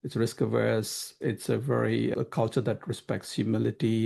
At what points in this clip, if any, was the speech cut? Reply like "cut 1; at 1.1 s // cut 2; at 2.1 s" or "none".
cut 1; at 1.1 s // cut 2; at 2.1 s